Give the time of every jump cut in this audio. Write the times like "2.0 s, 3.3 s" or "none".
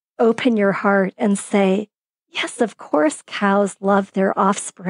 none